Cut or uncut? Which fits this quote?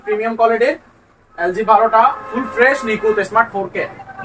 uncut